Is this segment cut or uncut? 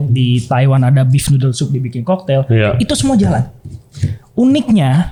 uncut